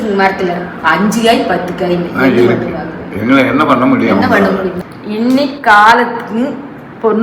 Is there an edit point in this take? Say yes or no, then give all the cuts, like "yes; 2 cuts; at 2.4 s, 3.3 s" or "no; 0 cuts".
yes; 1 cut; at 4.7 s